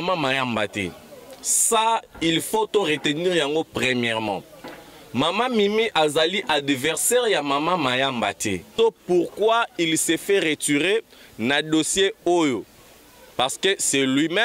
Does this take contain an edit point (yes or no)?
yes